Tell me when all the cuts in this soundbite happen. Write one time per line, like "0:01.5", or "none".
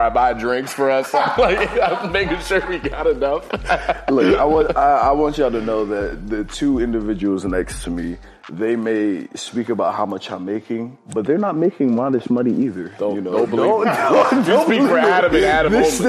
0:11.0